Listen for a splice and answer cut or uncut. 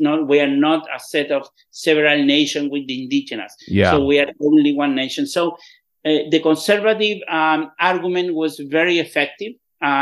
uncut